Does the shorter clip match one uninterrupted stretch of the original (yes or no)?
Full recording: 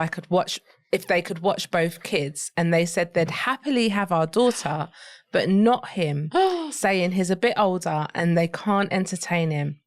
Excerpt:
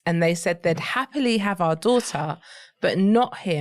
yes